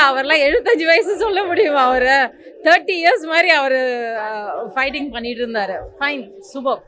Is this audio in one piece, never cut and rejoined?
yes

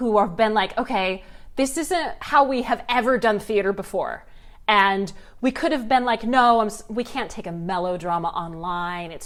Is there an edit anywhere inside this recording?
no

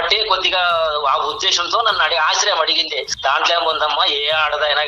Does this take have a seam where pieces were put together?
yes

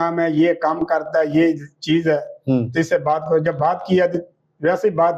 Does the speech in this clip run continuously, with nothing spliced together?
yes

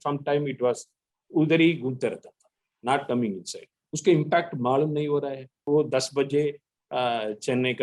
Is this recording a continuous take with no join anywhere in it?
no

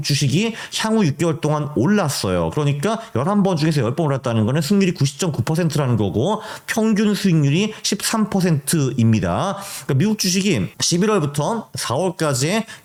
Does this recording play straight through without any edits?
yes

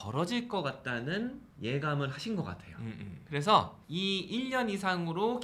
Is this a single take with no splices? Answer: no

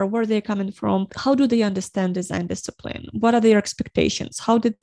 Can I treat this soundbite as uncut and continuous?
yes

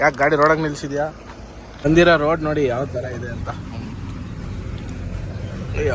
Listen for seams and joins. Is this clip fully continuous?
no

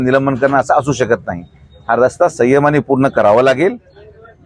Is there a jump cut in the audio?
no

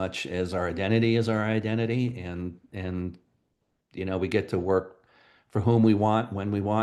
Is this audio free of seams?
yes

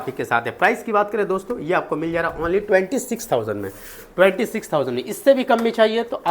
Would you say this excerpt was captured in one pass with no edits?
yes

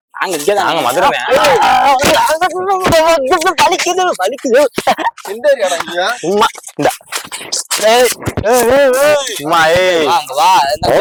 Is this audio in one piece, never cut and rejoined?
yes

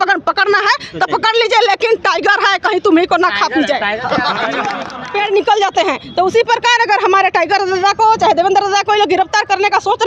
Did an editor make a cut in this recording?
yes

